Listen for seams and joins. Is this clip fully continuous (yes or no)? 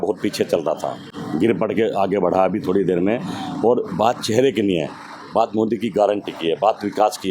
yes